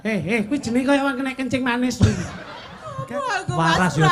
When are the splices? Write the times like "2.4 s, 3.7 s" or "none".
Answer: 3.0 s